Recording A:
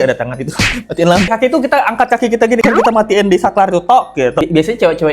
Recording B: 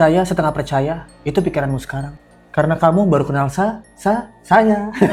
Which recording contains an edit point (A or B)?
A